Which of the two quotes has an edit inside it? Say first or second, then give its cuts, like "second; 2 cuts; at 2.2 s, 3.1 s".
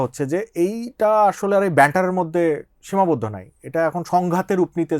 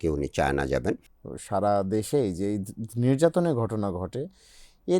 second; 1 cut; at 1.1 s